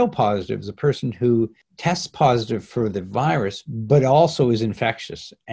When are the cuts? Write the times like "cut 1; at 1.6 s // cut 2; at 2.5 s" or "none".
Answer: cut 1; at 1.7 s

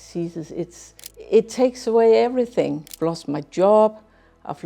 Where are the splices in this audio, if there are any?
cut 1; at 1.1 s // cut 2; at 2.9 s

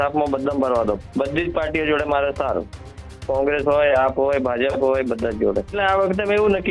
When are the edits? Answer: cut 1; at 1.1 s // cut 2; at 5.8 s

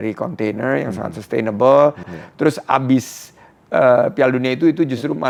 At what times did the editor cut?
none

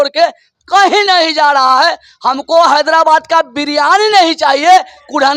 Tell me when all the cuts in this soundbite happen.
none

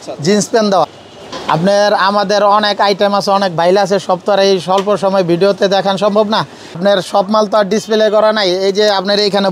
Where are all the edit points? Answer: cut 1; at 0.8 s // cut 2; at 6.6 s

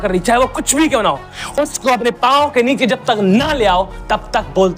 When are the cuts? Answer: none

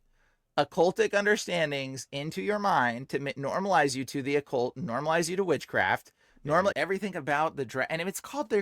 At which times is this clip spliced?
cut 1; at 6.7 s

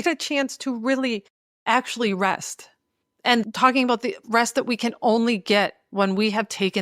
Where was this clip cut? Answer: cut 1; at 3.4 s

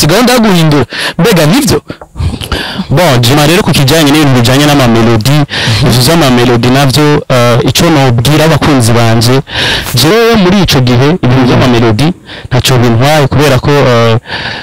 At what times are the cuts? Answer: cut 1; at 3.3 s // cut 2; at 10.1 s

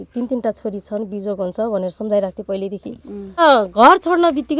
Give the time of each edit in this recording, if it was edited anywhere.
cut 1; at 3.4 s

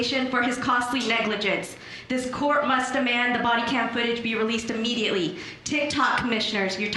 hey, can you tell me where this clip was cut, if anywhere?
none

